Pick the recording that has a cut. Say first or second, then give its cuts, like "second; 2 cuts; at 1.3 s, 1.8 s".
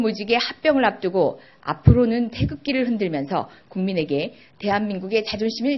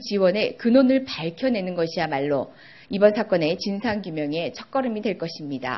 second; 1 cut; at 0.9 s